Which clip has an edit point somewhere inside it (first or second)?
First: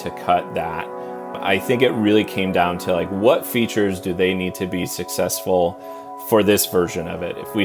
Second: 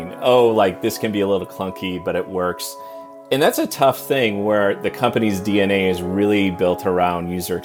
first